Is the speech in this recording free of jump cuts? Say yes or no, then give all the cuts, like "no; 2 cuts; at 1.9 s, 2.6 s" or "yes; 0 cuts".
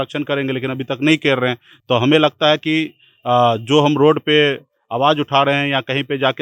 yes; 0 cuts